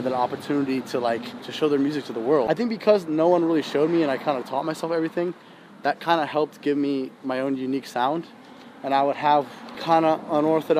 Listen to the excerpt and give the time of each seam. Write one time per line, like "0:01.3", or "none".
0:02.5